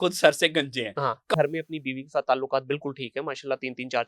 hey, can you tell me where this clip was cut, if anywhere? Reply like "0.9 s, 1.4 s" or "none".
1.4 s